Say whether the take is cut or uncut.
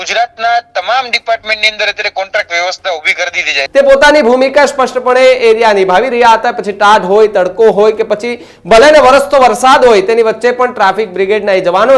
cut